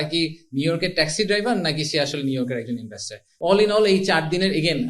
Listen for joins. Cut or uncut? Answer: cut